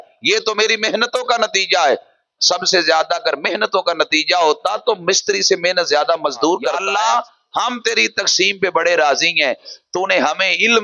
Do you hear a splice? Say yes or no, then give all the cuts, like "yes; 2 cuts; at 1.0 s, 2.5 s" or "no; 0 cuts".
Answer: yes; 1 cut; at 6.8 s